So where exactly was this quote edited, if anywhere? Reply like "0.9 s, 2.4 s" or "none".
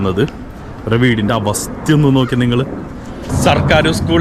3.3 s